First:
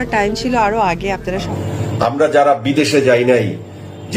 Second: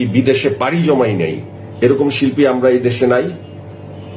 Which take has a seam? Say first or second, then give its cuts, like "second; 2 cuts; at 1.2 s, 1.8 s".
first; 1 cut; at 1.5 s